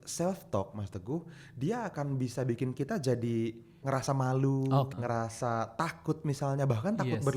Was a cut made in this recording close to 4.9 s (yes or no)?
yes